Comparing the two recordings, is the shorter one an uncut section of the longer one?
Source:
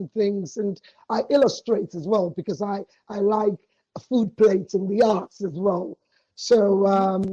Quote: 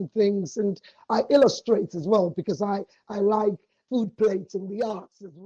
no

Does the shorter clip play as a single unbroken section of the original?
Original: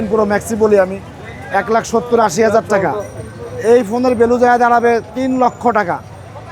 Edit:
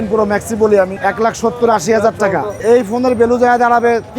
no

